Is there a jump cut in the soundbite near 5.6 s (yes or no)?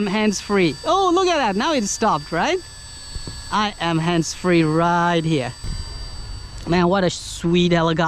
yes